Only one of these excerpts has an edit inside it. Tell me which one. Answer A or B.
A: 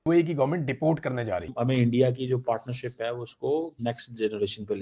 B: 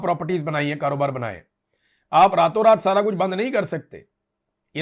A